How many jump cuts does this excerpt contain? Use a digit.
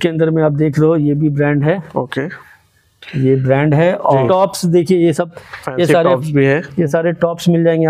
1